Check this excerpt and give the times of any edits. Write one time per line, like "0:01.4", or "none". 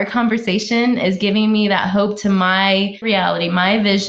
0:03.1